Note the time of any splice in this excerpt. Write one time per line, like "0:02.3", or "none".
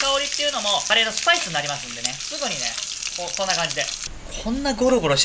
0:00.8
0:02.2
0:04.0

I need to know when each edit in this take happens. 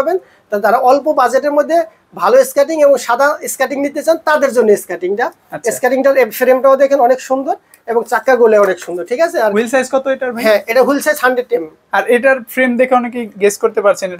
none

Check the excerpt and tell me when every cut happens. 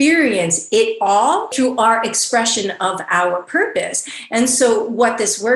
0:01.5

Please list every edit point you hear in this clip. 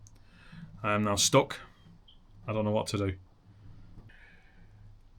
0:04.1

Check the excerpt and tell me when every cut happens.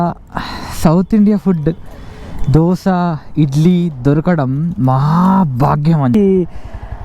0:06.1

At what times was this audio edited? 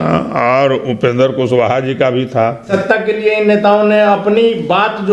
0:02.7

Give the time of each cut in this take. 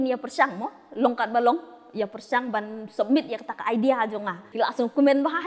0:04.4

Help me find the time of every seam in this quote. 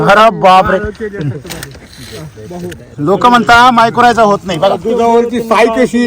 0:04.8

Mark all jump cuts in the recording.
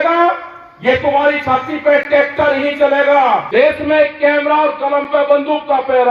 0:03.5

